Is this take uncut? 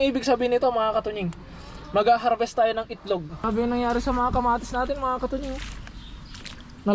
no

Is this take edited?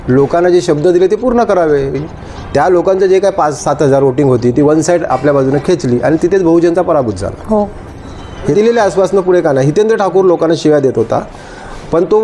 yes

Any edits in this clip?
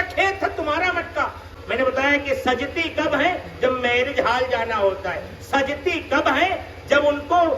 yes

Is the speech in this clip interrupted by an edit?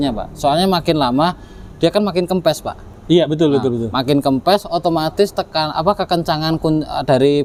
no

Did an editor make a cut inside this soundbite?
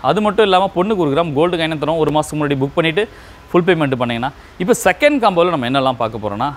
no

